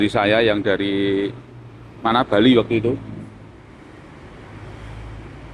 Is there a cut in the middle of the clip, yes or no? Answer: no